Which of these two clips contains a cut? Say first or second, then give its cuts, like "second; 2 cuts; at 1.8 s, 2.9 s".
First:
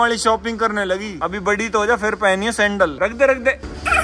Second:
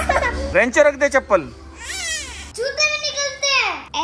second; 1 cut; at 2.4 s